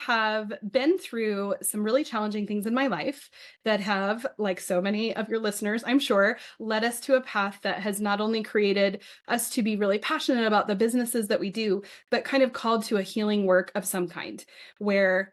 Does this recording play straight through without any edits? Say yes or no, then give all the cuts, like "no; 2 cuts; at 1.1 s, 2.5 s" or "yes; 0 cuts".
yes; 0 cuts